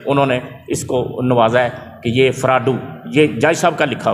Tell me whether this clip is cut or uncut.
uncut